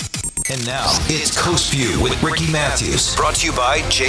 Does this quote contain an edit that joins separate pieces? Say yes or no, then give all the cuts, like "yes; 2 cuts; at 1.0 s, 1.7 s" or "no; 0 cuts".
no; 0 cuts